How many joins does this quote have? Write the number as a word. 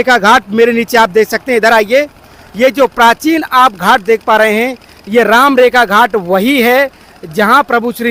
zero